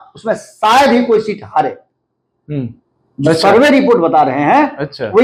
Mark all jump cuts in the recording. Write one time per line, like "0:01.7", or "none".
none